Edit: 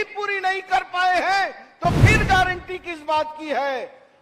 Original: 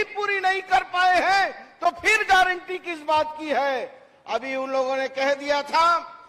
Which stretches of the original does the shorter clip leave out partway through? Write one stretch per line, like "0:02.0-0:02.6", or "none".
none